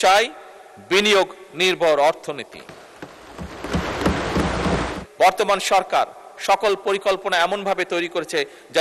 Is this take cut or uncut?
cut